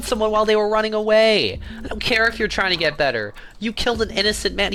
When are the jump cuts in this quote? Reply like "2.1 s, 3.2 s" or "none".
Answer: none